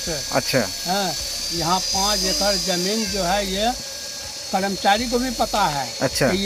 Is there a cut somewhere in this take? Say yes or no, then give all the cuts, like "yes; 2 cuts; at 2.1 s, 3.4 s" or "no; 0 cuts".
no; 0 cuts